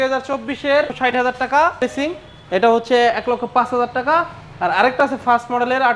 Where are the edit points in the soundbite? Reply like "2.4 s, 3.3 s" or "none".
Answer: 0.9 s, 1.8 s